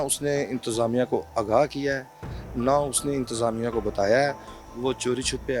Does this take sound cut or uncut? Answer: uncut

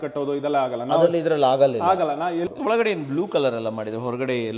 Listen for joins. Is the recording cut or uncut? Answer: cut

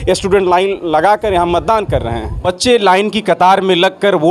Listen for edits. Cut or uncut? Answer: cut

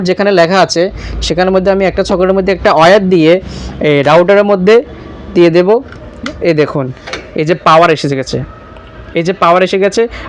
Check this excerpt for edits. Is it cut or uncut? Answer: uncut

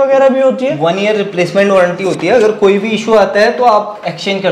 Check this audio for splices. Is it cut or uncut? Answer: uncut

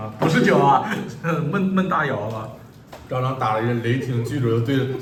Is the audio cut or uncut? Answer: uncut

